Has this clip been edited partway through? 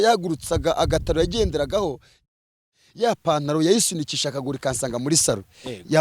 yes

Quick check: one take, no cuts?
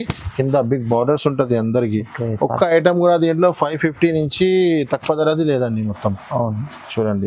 yes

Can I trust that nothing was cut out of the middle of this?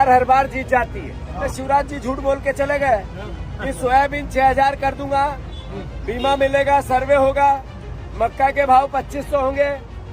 no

